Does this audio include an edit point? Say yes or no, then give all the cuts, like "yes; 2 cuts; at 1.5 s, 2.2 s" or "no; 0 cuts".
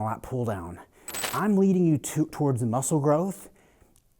yes; 1 cut; at 1.3 s